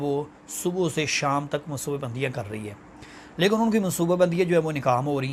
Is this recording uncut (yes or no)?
yes